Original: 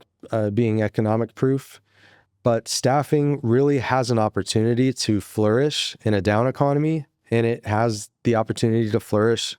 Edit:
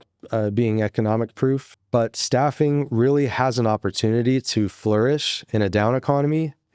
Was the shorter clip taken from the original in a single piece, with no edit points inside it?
no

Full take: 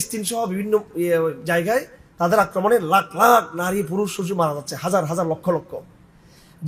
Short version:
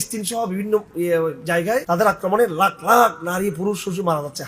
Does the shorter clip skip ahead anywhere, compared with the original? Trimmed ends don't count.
yes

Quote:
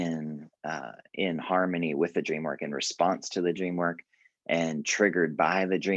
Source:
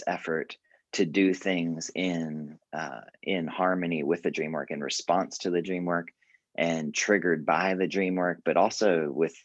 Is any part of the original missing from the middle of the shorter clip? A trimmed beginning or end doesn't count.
no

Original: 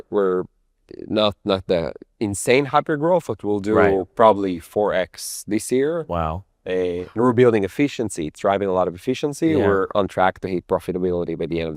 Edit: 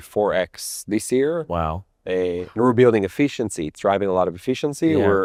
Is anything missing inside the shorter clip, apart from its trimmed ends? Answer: no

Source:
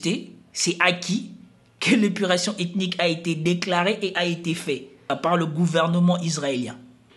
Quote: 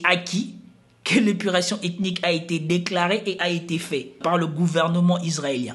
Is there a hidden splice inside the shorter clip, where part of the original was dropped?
yes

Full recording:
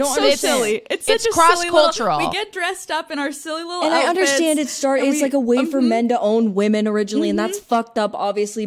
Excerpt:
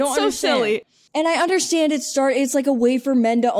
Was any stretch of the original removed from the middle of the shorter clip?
yes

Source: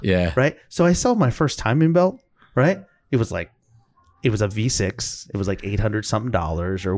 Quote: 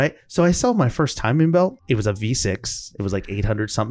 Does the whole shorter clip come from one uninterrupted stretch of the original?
no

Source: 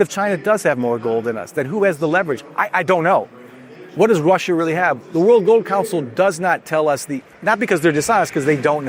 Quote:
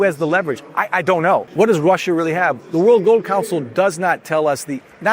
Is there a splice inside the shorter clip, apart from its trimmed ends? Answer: yes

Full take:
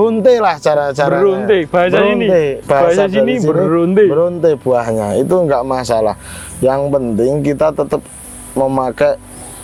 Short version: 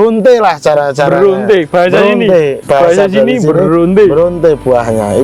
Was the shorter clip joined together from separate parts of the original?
no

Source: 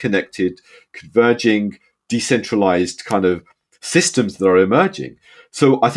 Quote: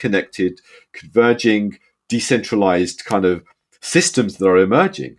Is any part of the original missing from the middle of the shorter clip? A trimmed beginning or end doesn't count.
no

